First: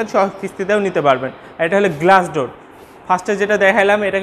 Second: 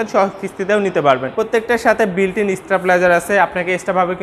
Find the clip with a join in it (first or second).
second